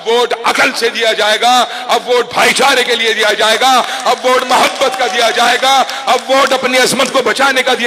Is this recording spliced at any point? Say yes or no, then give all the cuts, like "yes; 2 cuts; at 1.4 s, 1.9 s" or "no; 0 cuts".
no; 0 cuts